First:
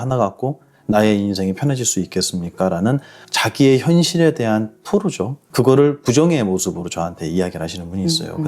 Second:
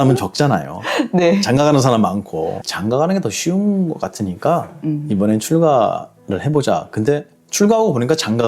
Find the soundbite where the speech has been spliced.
second; 1 cut; at 2.6 s

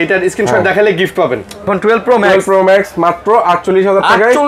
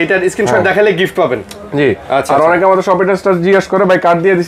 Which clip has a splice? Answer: first; 1 cut; at 1.7 s

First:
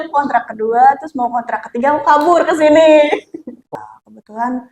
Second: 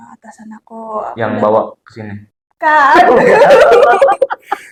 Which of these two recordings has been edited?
first; 1 cut; at 3.6 s

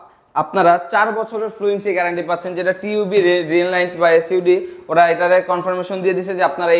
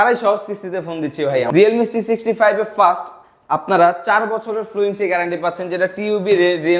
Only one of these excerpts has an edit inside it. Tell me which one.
second; 1 cut; at 1.5 s

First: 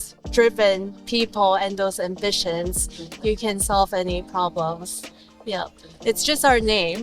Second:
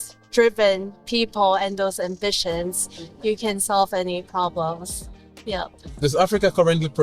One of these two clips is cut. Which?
second; 1 cut; at 5.9 s

